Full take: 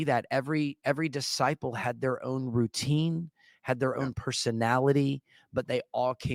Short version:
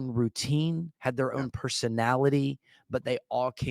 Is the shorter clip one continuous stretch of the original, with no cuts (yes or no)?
no